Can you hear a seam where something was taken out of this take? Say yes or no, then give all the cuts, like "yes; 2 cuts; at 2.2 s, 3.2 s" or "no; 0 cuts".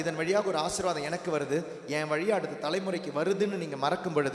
no; 0 cuts